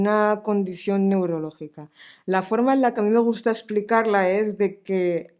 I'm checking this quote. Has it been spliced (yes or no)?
no